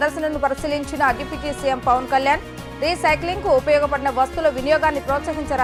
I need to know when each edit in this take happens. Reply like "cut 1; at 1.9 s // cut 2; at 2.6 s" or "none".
none